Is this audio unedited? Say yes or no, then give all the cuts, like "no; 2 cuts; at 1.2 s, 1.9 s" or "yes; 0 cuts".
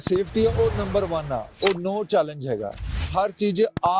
no; 1 cut; at 3.1 s